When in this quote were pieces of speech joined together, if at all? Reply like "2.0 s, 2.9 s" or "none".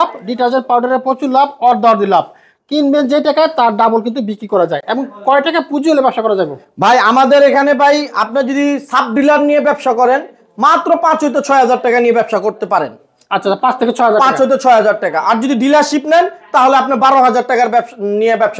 none